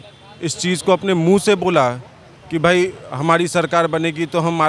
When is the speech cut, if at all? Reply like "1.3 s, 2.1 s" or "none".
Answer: none